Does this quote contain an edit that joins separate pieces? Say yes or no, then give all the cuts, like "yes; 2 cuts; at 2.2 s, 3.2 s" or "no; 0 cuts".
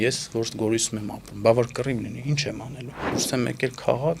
yes; 1 cut; at 3.2 s